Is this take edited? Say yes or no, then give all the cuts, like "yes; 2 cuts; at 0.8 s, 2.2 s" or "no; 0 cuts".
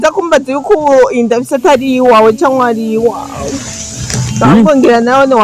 no; 0 cuts